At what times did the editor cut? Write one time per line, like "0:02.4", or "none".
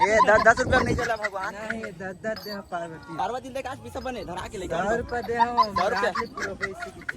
0:03.2